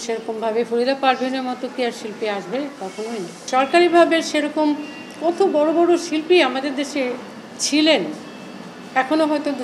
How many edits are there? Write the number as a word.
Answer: one